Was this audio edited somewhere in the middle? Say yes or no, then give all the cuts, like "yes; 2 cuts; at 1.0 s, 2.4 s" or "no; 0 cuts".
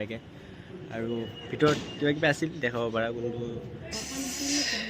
yes; 1 cut; at 4.0 s